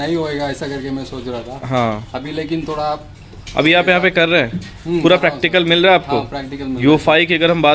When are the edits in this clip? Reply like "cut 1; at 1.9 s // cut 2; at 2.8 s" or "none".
none